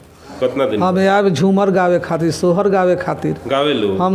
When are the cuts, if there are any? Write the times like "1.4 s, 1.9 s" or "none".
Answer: none